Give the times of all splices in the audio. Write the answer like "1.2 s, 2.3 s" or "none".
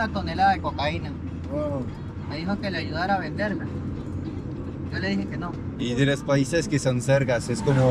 none